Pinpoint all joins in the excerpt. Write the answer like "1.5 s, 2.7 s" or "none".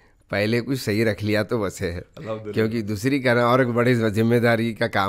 none

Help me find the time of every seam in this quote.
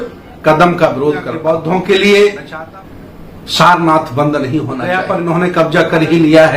1.3 s, 5.0 s

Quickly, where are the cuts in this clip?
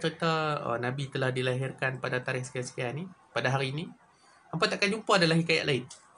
none

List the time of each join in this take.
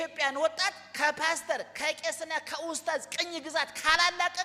none

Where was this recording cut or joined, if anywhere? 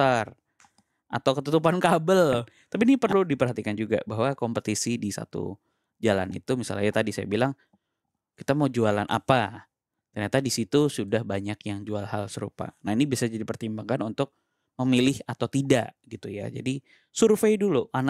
2.6 s

